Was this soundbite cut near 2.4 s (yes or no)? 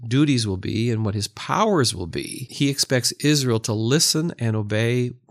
yes